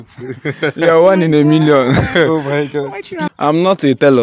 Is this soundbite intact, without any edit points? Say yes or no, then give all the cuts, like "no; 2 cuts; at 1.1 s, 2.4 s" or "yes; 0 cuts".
no; 1 cut; at 3.2 s